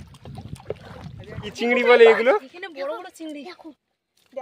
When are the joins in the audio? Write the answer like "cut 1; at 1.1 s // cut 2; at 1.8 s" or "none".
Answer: cut 1; at 1.5 s